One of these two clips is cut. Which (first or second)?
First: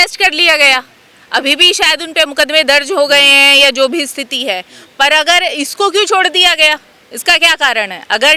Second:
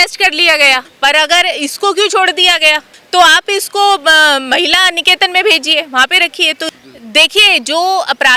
second